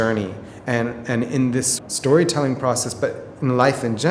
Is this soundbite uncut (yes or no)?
no